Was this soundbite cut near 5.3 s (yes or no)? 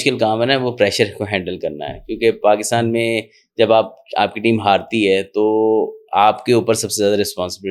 no